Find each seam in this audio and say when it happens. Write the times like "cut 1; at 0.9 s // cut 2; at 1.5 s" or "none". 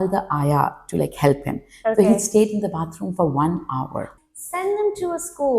cut 1; at 4.1 s